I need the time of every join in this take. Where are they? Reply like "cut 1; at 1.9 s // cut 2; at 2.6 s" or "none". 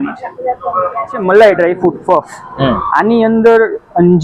cut 1; at 1.1 s